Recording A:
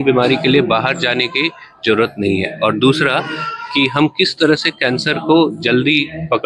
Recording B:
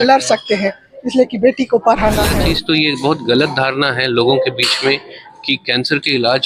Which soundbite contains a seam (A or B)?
B